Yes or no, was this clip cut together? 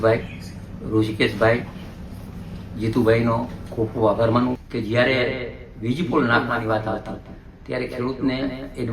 yes